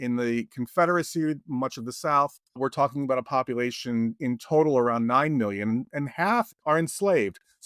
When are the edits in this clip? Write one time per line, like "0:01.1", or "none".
none